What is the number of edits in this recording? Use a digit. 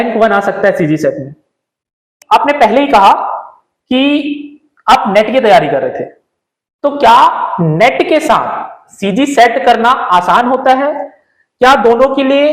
1